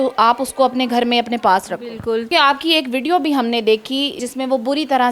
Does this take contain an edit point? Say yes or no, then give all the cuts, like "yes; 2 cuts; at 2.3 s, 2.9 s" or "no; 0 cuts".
yes; 2 cuts; at 2.3 s, 4.1 s